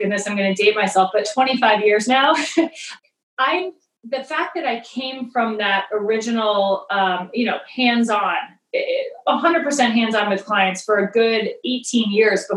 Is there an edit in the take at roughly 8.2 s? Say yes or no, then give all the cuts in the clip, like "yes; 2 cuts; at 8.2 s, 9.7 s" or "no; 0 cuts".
no; 1 cut; at 2.8 s